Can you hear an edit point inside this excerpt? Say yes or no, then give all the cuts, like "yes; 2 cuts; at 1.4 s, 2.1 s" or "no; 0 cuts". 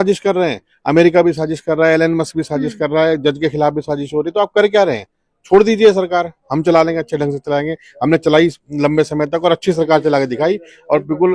no; 0 cuts